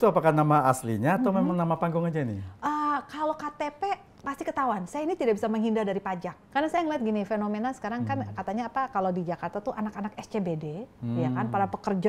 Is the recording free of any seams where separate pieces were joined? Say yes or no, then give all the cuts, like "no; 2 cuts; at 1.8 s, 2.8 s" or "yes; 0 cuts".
no; 1 cut; at 6.4 s